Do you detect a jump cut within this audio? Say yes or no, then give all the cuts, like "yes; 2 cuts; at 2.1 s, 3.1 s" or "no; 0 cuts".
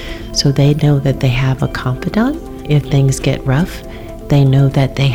yes; 1 cut; at 2.5 s